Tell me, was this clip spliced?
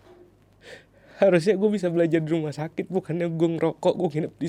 no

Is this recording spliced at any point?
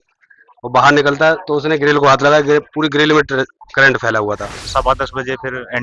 yes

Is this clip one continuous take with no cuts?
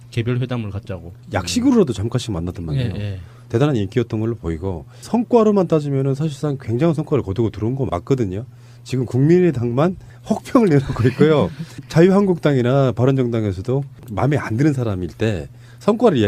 yes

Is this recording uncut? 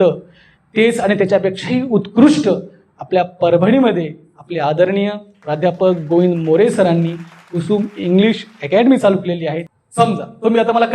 no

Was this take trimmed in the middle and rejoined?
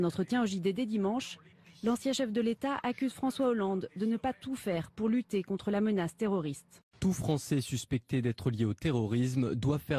yes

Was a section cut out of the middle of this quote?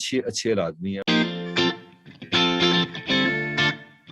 yes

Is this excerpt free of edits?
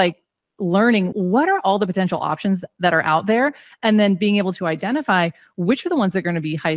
no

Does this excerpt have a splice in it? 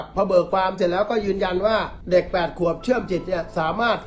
yes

